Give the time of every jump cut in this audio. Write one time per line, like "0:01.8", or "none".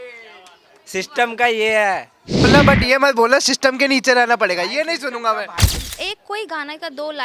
0:02.5
0:05.8